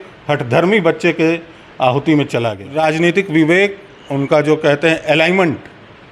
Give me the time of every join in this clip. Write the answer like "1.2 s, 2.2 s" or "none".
2.6 s